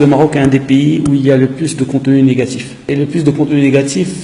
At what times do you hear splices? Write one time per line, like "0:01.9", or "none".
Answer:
0:02.8